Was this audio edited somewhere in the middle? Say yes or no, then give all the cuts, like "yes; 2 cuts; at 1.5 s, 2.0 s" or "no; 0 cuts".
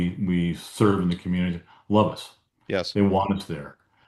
no; 0 cuts